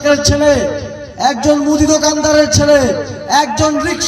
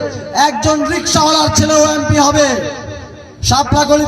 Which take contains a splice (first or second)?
second